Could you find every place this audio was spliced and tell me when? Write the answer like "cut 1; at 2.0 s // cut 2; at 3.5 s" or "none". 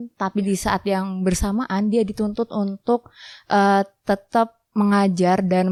none